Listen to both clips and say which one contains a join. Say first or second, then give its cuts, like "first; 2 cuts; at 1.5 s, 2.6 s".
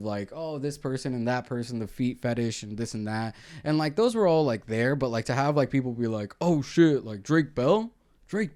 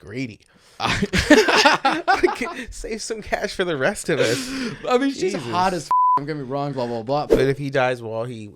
second; 1 cut; at 7.3 s